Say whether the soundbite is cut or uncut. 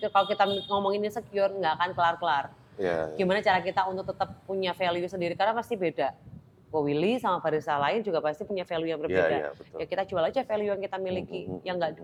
uncut